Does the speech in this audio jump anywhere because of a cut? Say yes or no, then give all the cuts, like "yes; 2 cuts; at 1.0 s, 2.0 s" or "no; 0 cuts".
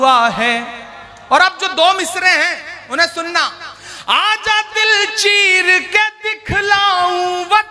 no; 0 cuts